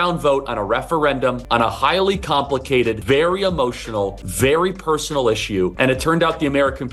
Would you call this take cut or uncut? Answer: cut